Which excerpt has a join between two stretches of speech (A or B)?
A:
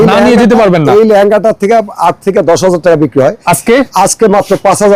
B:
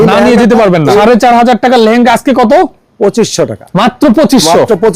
B